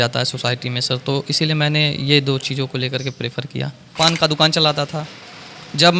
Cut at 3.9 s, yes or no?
yes